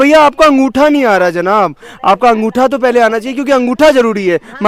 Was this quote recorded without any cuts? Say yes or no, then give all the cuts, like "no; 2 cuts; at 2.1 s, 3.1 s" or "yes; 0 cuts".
yes; 0 cuts